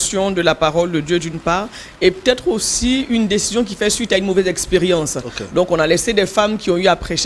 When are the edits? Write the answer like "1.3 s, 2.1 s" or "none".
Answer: none